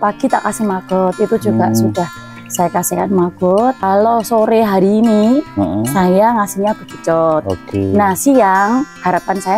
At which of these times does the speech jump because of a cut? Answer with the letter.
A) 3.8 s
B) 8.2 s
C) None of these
A